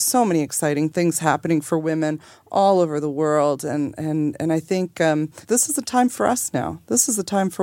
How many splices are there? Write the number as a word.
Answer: two